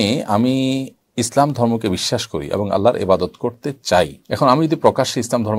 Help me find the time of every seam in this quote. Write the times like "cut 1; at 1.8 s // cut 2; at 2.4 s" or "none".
cut 1; at 1.0 s // cut 2; at 4.2 s